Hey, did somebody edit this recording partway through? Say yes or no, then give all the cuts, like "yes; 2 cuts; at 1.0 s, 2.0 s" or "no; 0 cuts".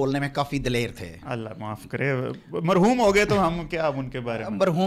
no; 0 cuts